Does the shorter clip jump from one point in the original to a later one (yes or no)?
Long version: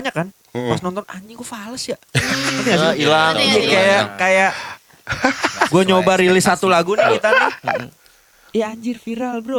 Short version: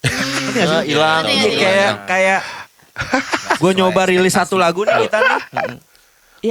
no